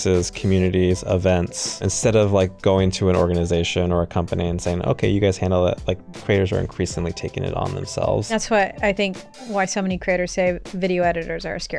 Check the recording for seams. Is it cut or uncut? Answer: cut